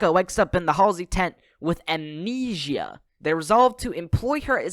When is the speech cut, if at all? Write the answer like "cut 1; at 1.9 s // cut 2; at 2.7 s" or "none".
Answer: cut 1; at 3.0 s